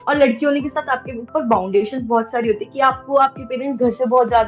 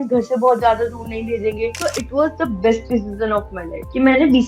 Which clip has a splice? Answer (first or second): second